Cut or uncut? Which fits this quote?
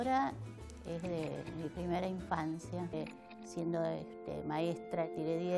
uncut